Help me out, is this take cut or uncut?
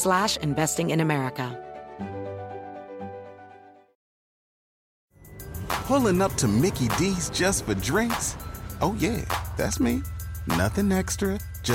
cut